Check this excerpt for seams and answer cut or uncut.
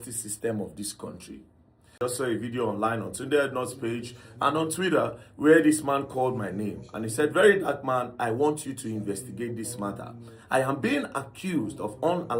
cut